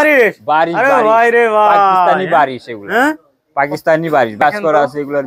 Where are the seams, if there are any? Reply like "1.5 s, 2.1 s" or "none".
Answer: 4.4 s